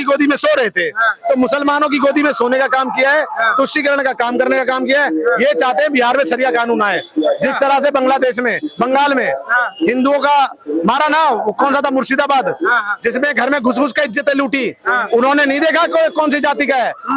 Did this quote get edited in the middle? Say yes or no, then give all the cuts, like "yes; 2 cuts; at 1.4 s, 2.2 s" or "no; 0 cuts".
no; 0 cuts